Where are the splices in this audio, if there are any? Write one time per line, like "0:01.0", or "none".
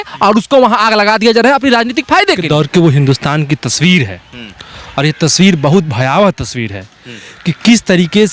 0:02.4